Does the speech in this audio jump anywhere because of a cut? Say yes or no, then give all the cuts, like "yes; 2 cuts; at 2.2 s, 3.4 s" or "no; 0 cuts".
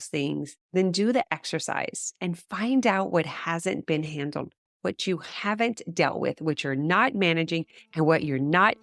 no; 0 cuts